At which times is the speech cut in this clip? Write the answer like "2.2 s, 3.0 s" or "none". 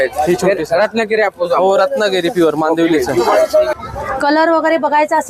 3.7 s